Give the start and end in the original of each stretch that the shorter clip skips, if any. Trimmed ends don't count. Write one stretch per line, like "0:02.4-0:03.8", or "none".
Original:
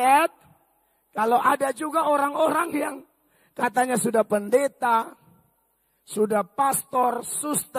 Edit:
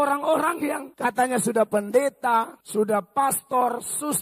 0:03.0-0:03.4
0:05.2-0:06.0